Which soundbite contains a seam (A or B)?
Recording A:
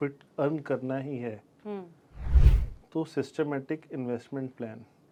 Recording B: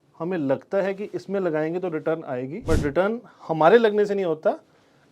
B